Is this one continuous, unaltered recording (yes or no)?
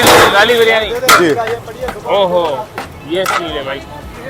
yes